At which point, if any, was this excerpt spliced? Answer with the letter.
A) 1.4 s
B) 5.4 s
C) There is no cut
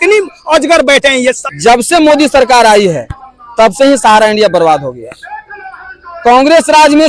A